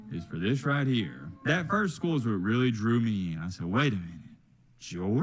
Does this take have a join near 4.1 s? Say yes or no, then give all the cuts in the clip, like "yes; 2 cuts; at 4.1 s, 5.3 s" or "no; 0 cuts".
no; 1 cut; at 1.2 s